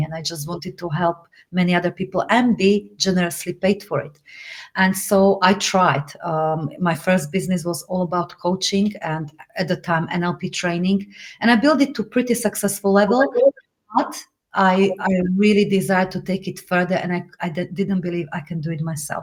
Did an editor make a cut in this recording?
no; 0 cuts

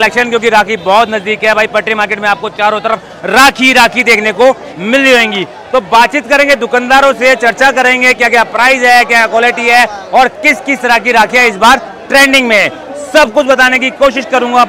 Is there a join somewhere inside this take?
no; 0 cuts

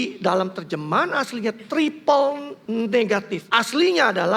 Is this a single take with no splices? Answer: no; 2 cuts; at 2.5 s, 3.4 s

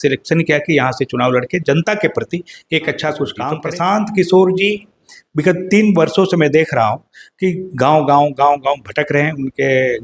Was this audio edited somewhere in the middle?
yes; 1 cut; at 3.5 s

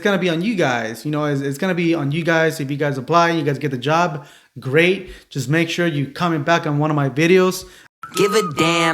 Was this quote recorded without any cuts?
no; 1 cut; at 7.9 s

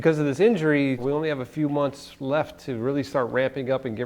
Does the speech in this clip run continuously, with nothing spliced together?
no; 1 cut; at 1.0 s

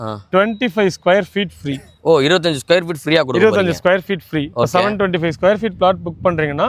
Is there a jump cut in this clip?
no; 0 cuts

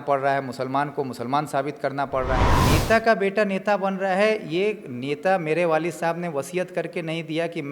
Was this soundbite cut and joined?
yes; 1 cut; at 2.6 s

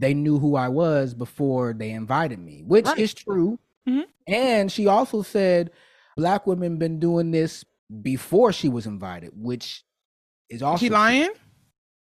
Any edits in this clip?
no; 0 cuts

